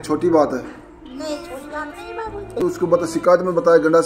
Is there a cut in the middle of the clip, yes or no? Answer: yes